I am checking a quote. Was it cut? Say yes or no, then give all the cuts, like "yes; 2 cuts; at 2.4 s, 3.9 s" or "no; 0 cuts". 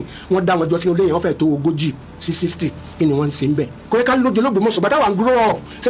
yes; 1 cut; at 3.8 s